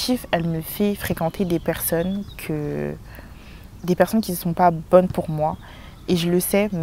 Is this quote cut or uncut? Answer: uncut